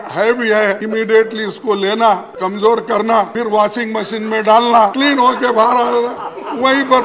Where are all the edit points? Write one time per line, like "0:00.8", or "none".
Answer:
0:00.8
0:02.3
0:03.3
0:04.9